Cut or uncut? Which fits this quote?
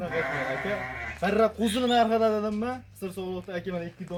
uncut